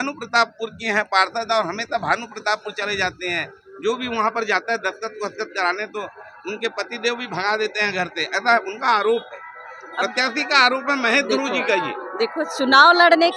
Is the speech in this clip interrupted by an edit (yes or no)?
no